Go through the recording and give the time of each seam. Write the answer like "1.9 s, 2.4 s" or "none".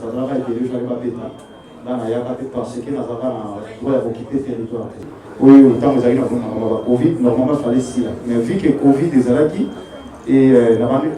5.2 s